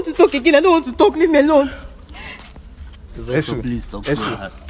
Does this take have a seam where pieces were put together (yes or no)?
no